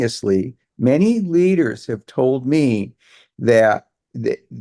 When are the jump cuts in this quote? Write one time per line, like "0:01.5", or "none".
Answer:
none